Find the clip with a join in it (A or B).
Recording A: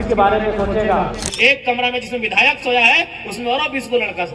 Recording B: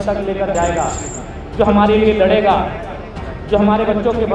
A